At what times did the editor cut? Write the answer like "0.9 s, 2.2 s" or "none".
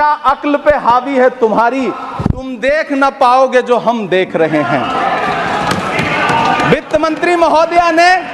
none